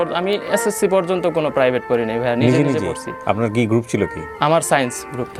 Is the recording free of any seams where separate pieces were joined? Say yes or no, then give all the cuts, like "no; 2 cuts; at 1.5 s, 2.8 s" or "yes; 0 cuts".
yes; 0 cuts